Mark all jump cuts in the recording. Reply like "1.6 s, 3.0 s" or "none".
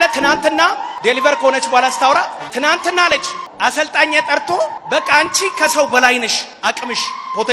0.9 s, 2.4 s, 3.4 s, 4.8 s, 6.4 s